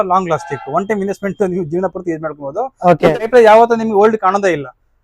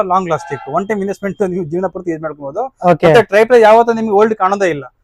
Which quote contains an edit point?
first; 1 cut; at 3.2 s

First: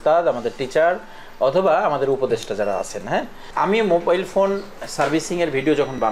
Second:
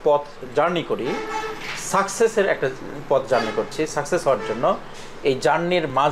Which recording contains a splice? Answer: first; 1 cut; at 3.4 s

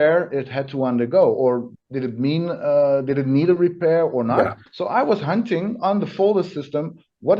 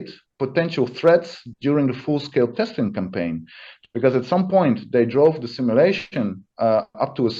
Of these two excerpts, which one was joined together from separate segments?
first; 2 cuts; at 1.8 s, 4.7 s

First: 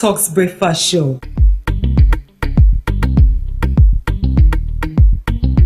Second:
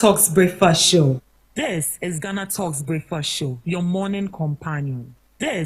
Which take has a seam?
first; 1 cut; at 1.4 s

